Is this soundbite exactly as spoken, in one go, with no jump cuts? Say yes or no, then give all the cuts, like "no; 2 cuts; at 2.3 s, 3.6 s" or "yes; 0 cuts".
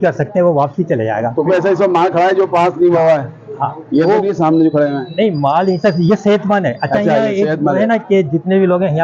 yes; 0 cuts